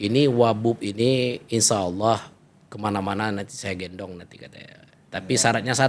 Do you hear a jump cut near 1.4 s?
no; 0 cuts

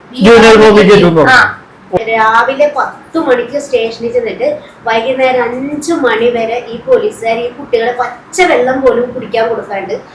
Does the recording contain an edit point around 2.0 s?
yes; 1 cut; at 2.0 s

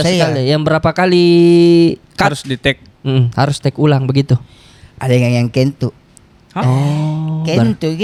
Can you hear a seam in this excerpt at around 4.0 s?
no; 0 cuts

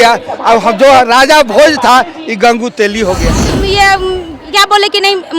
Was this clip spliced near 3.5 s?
yes; 1 cut; at 3.5 s

